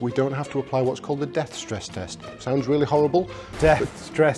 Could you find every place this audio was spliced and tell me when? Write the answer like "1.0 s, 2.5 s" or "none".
3.4 s